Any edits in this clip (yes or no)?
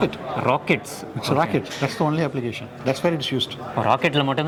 no